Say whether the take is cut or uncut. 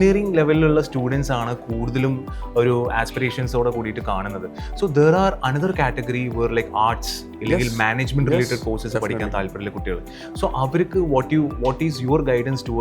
uncut